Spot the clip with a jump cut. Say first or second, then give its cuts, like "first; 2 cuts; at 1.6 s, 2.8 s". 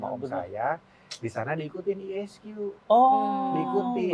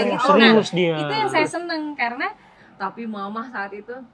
second; 1 cut; at 2.5 s